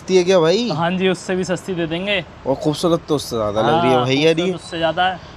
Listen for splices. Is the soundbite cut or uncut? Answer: uncut